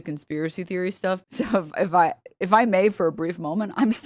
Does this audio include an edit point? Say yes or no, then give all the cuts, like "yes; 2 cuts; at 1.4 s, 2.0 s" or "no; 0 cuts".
yes; 1 cut; at 1.3 s